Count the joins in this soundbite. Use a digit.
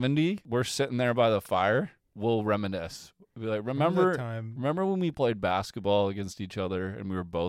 0